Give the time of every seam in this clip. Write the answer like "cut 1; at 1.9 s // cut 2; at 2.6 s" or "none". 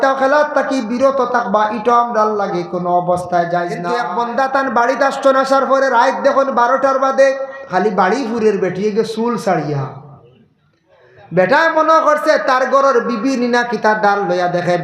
cut 1; at 3.9 s